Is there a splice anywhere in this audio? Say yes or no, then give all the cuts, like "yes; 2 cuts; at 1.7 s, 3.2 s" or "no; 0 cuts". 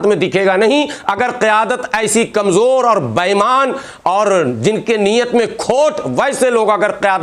no; 0 cuts